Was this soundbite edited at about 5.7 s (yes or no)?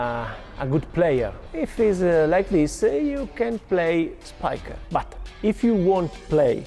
no